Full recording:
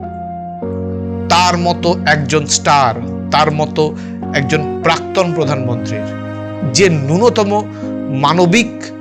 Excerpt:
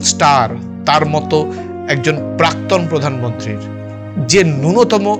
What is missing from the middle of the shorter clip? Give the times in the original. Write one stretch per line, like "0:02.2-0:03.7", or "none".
none